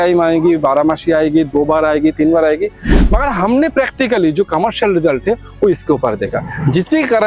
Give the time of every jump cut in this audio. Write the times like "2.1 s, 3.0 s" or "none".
none